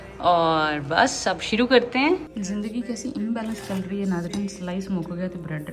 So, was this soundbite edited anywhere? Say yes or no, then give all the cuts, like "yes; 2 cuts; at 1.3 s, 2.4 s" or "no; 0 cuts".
yes; 1 cut; at 2.3 s